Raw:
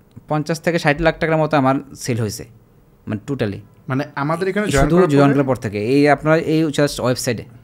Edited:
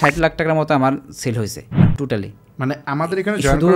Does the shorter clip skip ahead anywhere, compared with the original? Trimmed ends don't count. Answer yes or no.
yes